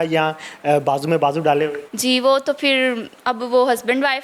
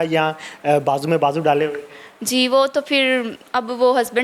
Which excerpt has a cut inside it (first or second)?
first